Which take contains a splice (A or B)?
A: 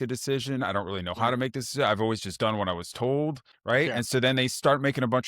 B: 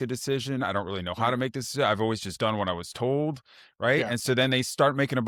A